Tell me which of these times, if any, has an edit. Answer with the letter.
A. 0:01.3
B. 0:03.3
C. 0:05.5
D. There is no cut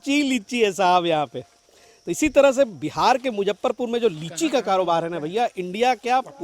D